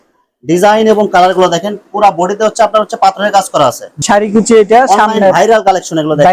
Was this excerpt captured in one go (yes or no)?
no